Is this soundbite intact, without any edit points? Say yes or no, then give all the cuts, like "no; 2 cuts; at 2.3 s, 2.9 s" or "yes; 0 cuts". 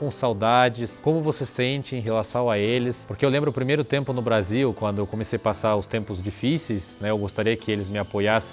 no; 1 cut; at 3.0 s